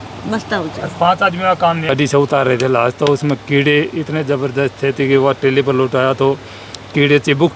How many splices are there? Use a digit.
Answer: 1